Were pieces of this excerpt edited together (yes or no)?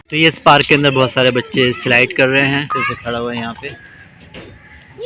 yes